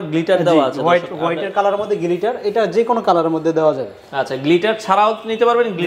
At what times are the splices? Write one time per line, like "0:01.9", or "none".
none